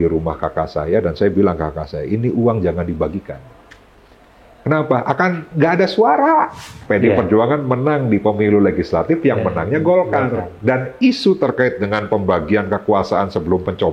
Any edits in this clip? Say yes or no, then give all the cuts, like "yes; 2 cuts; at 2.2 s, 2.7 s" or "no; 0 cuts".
yes; 1 cut; at 6.8 s